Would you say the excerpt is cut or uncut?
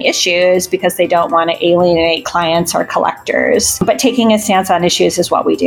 cut